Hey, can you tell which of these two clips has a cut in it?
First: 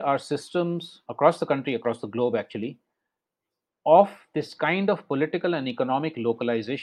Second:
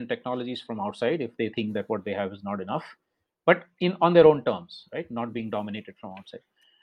first; 1 cut; at 1.0 s

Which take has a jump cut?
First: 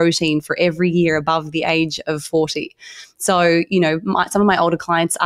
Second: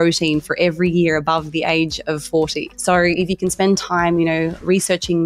second; 1 cut; at 2.7 s

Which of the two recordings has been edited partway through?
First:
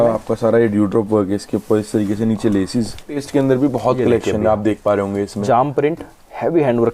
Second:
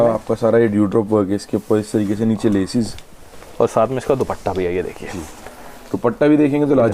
first; 1 cut; at 3.2 s

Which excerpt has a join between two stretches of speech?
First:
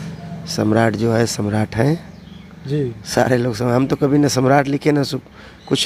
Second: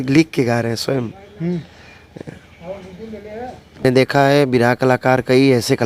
second; 1 cut; at 3.8 s

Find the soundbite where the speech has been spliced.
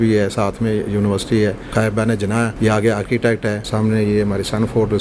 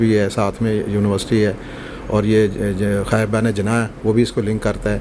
first; 2 cuts; at 2.1 s, 3.6 s

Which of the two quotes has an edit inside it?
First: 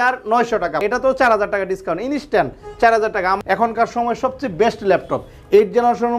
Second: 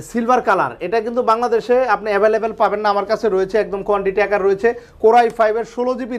first; 2 cuts; at 0.8 s, 3.4 s

